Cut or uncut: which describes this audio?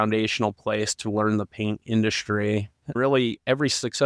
cut